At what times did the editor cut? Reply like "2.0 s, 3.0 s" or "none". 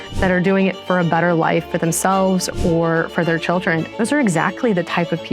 3.9 s